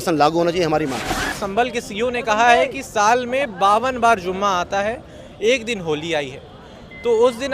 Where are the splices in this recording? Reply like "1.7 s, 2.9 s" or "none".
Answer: 1.4 s